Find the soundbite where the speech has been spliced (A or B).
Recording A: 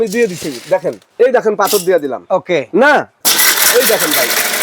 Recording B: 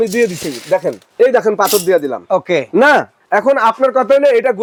A